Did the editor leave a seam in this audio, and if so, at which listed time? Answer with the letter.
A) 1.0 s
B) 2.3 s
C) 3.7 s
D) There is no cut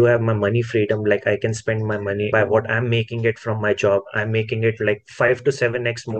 B